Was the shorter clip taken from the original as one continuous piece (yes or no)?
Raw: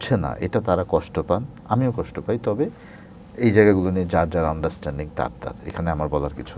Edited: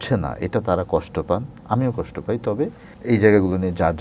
no